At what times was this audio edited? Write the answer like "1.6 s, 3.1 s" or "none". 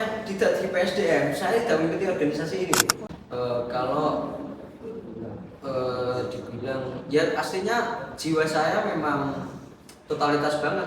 3.0 s